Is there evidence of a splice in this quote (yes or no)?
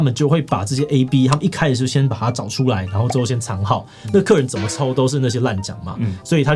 no